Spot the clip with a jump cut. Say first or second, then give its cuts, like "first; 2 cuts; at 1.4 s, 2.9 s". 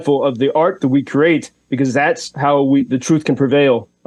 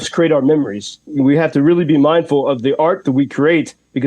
second; 1 cut; at 1.1 s